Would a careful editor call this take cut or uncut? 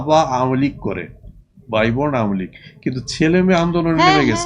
uncut